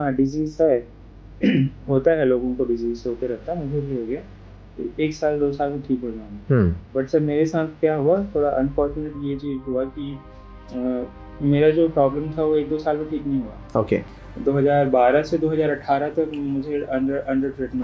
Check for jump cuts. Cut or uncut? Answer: uncut